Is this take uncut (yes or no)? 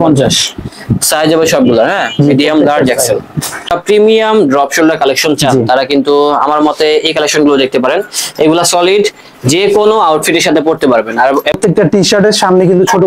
no